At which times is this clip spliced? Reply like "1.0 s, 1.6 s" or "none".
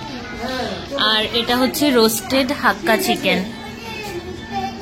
none